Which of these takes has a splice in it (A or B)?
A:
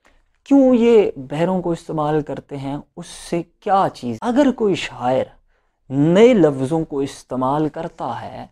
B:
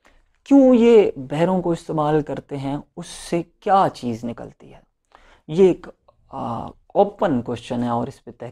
A